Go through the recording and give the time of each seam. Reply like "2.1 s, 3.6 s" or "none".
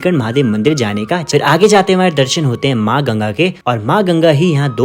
1.2 s, 3.6 s